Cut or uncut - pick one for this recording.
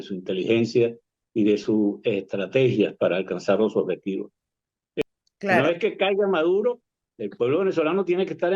cut